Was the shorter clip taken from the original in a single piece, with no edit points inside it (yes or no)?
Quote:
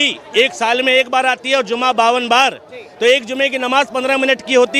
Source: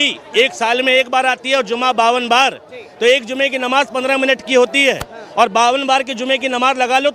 yes